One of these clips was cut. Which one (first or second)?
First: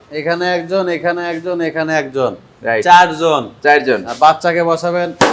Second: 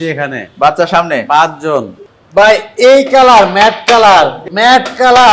second